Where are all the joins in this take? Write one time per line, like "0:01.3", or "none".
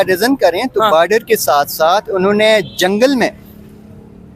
none